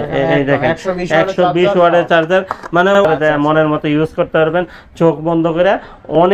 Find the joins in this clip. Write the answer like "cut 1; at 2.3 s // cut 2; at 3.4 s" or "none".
cut 1; at 3.0 s